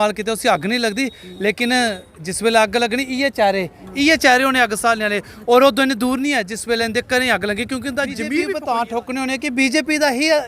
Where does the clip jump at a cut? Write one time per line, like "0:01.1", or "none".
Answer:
0:08.5